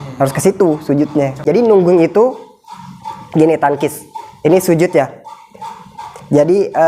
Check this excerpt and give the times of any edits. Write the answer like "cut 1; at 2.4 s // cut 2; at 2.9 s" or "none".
cut 1; at 1.4 s